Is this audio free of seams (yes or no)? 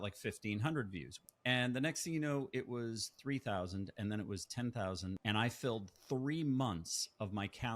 no